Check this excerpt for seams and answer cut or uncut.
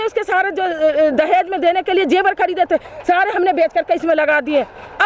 uncut